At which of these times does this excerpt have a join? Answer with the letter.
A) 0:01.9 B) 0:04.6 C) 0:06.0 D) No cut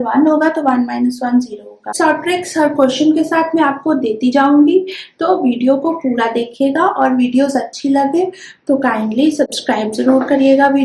A